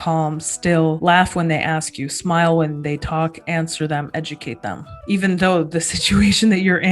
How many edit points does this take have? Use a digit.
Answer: 2